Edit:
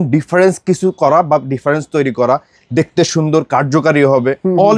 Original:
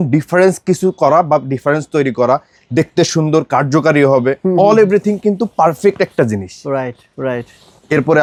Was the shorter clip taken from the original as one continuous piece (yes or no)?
yes